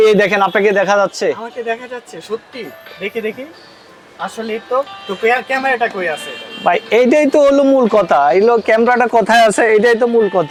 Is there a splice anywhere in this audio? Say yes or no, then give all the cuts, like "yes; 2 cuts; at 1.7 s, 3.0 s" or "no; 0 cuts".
no; 0 cuts